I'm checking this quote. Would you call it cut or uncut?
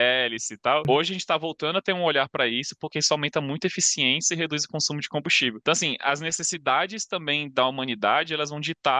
cut